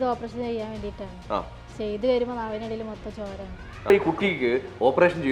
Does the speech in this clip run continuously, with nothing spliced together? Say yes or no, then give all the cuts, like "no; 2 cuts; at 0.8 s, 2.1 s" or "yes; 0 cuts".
no; 1 cut; at 3.9 s